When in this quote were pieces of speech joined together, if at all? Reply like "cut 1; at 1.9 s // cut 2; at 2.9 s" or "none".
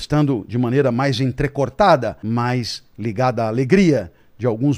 cut 1; at 2.1 s